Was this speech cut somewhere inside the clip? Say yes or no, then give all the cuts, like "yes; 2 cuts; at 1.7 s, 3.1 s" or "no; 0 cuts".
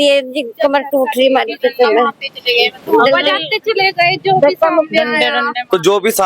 no; 0 cuts